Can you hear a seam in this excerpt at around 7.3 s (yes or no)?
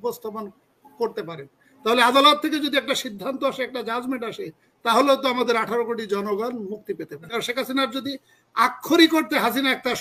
yes